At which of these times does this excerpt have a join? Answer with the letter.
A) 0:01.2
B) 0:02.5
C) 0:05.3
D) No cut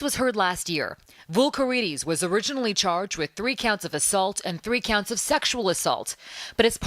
A